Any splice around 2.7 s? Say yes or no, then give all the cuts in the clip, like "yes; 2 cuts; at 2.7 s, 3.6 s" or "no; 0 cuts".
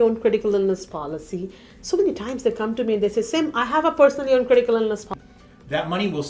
no; 1 cut; at 5.1 s